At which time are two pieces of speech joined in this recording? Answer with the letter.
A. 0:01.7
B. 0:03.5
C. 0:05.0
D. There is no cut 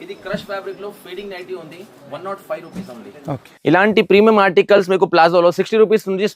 B